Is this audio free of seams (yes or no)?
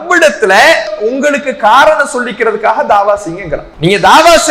no